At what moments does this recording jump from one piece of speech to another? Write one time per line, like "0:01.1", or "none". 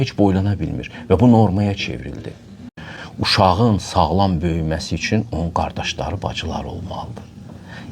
0:02.7